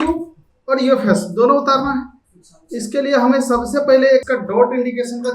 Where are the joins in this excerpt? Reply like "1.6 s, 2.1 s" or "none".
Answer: 4.2 s